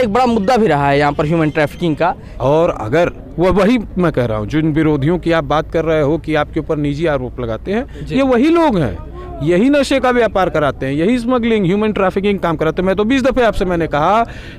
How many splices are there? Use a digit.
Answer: 1